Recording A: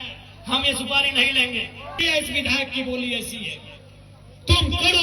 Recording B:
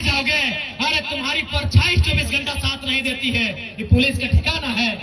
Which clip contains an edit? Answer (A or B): A